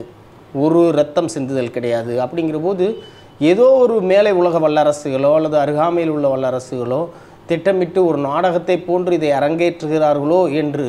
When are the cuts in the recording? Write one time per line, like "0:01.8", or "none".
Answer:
none